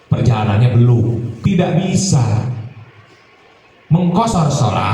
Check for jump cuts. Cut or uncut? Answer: cut